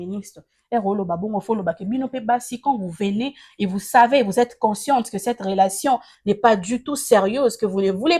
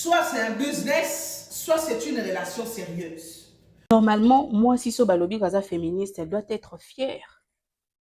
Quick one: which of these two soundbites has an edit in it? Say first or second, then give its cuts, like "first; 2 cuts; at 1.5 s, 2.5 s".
second; 1 cut; at 3.9 s